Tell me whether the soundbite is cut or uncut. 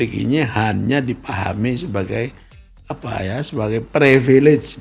uncut